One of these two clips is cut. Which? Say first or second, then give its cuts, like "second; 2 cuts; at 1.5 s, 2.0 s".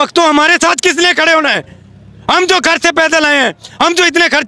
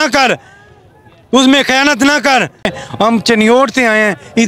second; 1 cut; at 2.7 s